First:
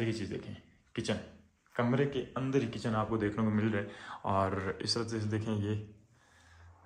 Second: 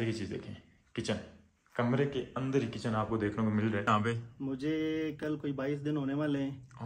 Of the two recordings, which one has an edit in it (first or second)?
second